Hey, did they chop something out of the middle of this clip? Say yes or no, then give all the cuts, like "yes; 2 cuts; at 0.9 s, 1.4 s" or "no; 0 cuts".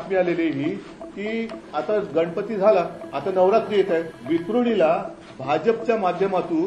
yes; 2 cuts; at 3.0 s, 4.1 s